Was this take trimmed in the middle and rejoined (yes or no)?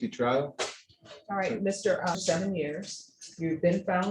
yes